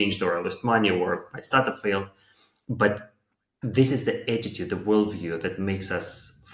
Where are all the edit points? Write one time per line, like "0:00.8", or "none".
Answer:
none